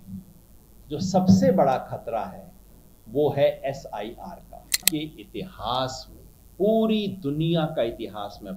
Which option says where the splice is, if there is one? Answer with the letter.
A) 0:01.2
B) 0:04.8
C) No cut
B